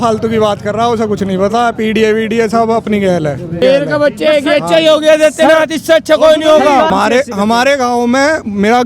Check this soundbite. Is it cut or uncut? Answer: cut